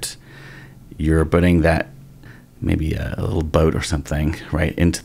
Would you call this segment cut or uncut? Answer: cut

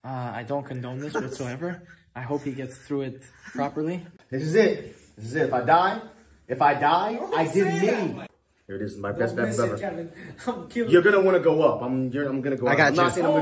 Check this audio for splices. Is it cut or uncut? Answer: cut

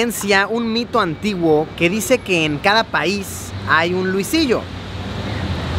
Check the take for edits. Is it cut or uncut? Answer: uncut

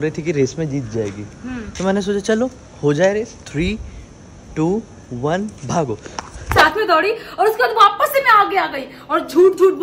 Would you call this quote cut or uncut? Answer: cut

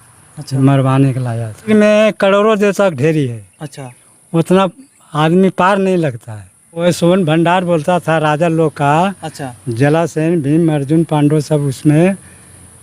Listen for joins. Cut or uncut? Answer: cut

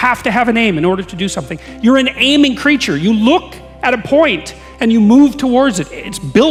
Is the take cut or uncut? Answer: uncut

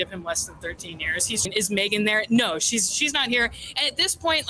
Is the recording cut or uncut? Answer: cut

